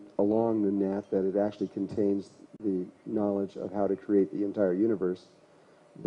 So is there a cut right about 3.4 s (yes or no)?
yes